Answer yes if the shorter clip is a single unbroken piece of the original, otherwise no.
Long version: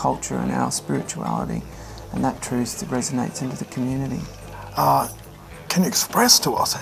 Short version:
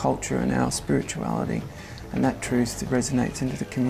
yes